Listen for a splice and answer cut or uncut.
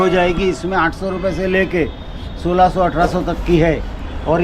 uncut